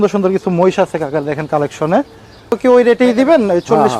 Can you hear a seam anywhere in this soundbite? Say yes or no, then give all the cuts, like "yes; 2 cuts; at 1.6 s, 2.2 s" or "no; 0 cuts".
yes; 1 cut; at 2.5 s